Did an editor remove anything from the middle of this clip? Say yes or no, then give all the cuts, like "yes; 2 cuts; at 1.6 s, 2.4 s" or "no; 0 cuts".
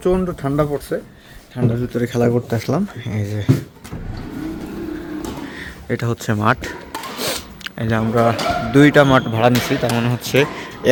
no; 0 cuts